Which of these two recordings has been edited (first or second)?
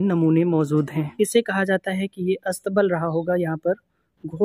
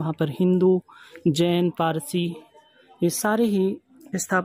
first